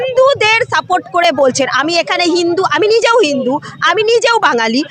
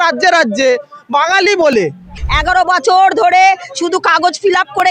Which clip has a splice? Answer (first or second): second